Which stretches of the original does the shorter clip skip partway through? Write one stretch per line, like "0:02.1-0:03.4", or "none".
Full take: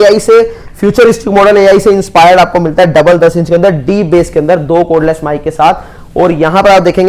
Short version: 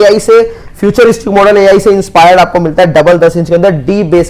none